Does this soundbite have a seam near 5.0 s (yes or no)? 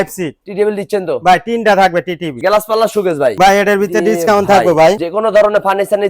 yes